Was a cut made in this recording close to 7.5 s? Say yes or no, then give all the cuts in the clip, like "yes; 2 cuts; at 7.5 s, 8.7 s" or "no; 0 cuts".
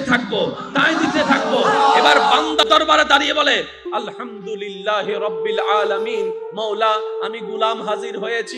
no; 1 cut; at 2.6 s